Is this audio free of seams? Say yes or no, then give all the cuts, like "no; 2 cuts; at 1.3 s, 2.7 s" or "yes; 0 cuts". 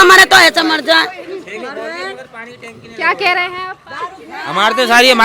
yes; 0 cuts